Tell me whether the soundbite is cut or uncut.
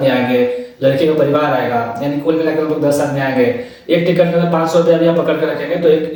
uncut